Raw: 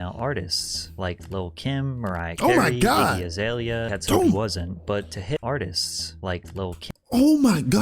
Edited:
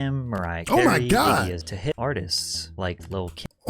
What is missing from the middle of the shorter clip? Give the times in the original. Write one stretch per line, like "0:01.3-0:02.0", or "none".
0:03.3-0:05.1